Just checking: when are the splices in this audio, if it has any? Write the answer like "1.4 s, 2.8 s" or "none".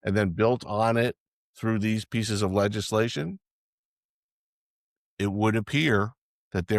none